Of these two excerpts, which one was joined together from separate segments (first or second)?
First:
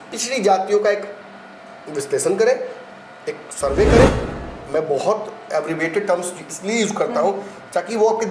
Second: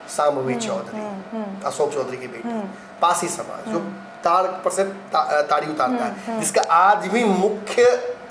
first